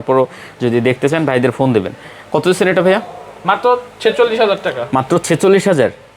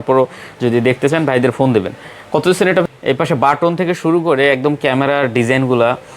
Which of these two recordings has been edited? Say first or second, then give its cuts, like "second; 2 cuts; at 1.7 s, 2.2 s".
second; 1 cut; at 2.8 s